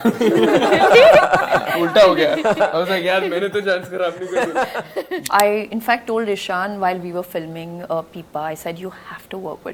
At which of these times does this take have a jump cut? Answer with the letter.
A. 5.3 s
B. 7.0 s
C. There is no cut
A